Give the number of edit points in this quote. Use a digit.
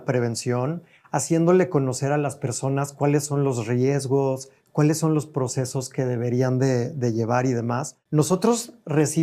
1